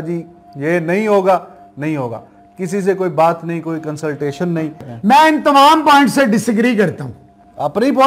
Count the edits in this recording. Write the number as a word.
zero